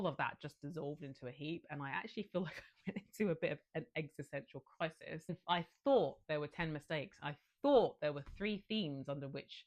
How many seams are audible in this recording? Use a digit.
1